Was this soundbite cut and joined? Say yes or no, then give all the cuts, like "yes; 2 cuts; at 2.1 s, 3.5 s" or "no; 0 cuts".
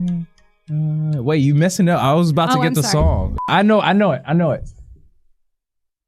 yes; 1 cut; at 3.4 s